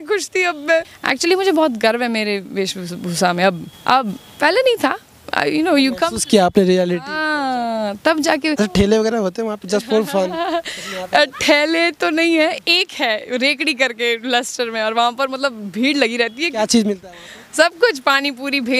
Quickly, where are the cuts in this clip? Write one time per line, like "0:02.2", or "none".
0:01.0
0:03.7
0:08.6